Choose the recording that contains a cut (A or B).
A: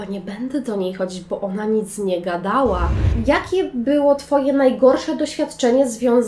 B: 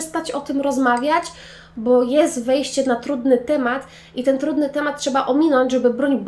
A